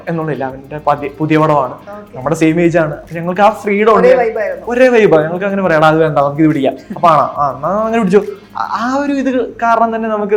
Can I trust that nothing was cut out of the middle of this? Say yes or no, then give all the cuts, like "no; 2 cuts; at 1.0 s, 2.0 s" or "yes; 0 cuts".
yes; 0 cuts